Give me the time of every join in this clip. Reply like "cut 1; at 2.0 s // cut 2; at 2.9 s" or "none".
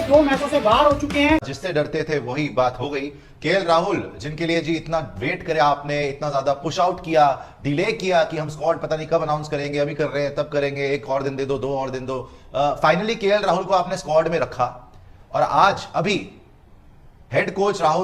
cut 1; at 1.5 s

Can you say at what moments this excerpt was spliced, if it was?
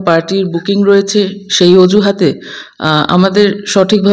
none

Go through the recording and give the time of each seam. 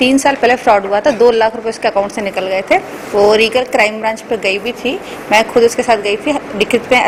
none

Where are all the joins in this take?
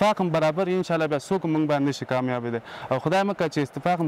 none

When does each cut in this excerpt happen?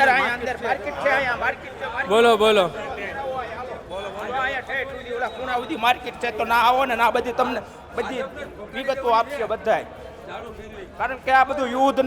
none

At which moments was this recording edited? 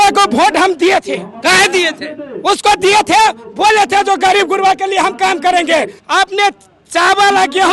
cut 1; at 6.0 s

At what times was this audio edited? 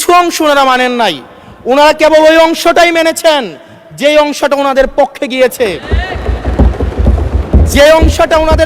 none

